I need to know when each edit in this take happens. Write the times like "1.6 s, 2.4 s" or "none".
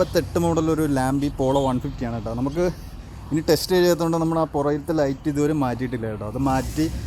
none